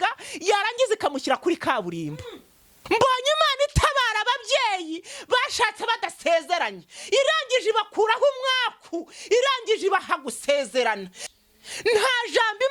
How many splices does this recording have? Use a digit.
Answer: 2